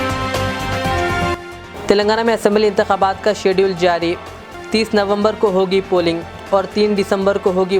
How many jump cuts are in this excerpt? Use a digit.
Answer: 1